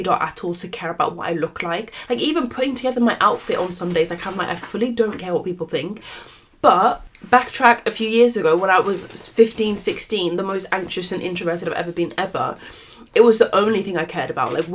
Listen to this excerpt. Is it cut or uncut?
uncut